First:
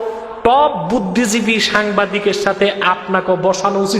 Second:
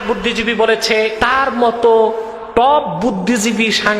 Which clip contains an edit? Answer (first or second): second